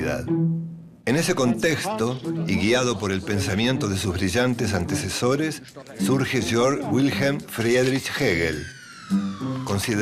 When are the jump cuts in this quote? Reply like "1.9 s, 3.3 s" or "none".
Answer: 4.9 s